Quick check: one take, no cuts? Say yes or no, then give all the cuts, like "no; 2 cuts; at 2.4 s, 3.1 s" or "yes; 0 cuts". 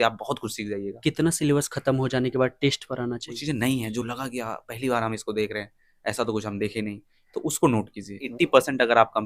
no; 3 cuts; at 0.9 s, 3.4 s, 8.3 s